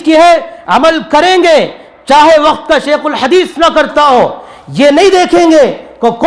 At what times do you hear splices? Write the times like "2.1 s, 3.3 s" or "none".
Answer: none

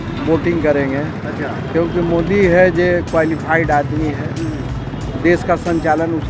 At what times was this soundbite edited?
none

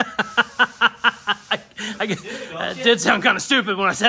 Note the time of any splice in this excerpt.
none

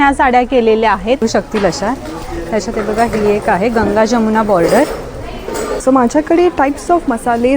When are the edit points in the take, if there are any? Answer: 1.2 s, 5.8 s

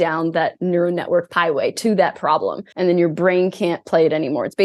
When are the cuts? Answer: 1.3 s, 2.6 s

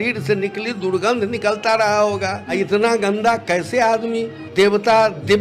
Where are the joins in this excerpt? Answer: 2.4 s, 4.4 s

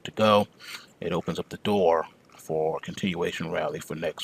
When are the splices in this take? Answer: none

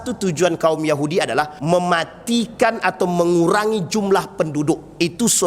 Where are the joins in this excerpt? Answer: 1.5 s

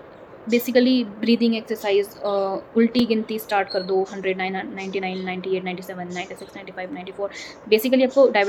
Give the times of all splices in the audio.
none

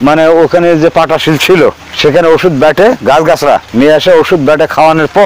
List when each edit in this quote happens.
none

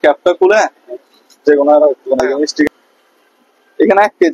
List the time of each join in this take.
2.7 s

